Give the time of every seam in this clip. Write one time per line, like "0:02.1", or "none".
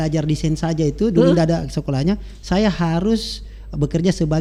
none